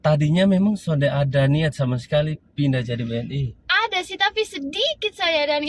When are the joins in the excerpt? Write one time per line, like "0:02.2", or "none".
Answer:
none